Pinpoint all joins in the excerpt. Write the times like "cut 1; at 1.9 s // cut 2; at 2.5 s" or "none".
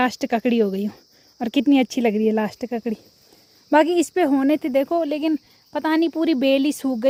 none

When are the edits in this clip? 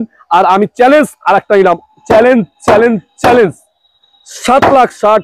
none

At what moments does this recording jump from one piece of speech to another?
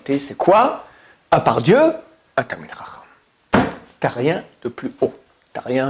none

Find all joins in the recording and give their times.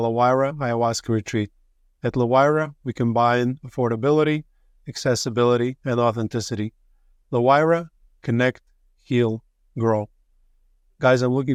none

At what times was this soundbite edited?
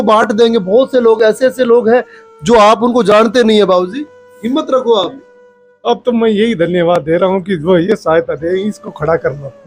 none

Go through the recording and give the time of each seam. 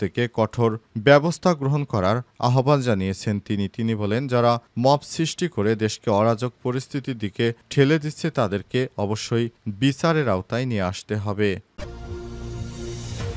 cut 1; at 11.8 s

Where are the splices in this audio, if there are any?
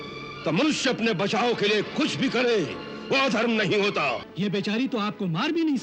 cut 1; at 4.3 s

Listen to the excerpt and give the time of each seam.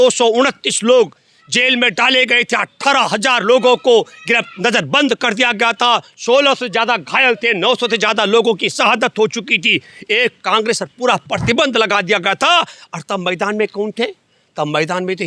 none

